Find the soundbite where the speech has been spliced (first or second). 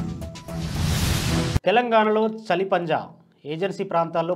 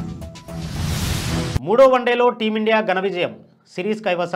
first